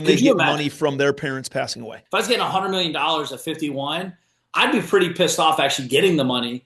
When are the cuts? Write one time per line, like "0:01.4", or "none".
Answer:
0:02.0

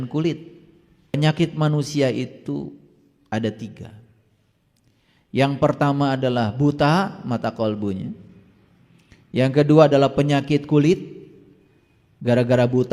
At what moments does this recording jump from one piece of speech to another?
0:01.1

